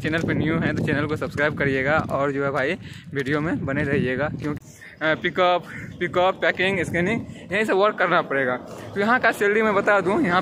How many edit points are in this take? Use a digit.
1